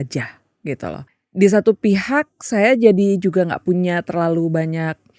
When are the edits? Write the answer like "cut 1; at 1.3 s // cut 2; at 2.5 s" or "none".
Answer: cut 1; at 1.1 s